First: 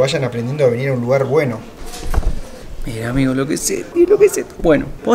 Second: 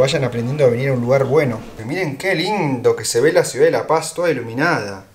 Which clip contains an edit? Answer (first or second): second